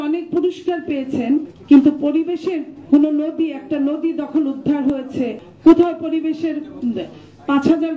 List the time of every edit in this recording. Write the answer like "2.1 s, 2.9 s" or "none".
none